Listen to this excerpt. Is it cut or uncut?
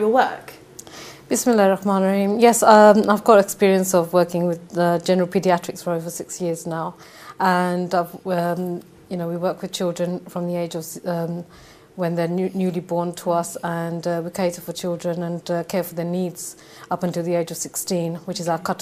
uncut